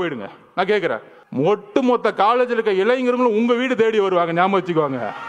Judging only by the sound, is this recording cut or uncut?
cut